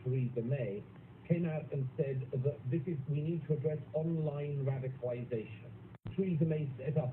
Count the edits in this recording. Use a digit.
1